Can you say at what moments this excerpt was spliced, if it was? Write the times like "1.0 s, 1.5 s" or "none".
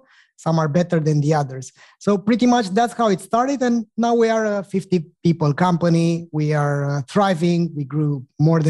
none